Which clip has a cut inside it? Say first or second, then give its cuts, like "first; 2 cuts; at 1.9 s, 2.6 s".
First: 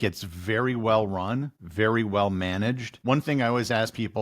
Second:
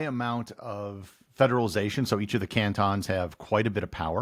first; 2 cuts; at 1.6 s, 2.9 s